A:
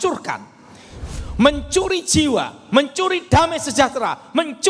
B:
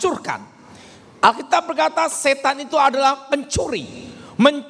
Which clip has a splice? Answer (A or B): A